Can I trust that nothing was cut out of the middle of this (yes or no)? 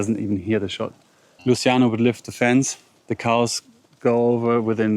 no